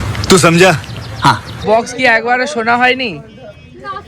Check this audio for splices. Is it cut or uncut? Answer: cut